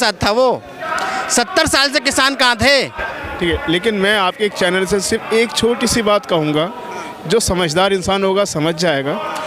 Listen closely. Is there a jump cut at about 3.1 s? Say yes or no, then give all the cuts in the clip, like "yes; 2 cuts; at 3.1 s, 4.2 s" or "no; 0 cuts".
yes; 1 cut; at 3.1 s